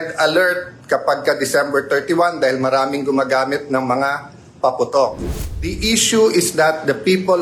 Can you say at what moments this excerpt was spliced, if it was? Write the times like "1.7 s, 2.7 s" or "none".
5.3 s